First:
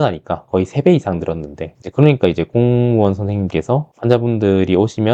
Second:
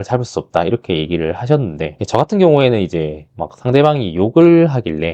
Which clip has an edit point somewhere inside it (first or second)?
second